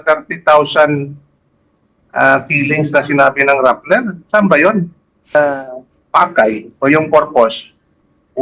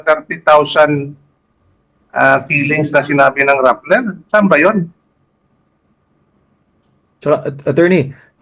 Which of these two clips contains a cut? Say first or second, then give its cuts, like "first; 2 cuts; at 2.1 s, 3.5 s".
first; 1 cut; at 5.4 s